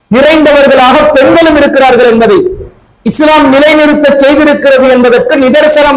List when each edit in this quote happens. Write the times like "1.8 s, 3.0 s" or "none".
none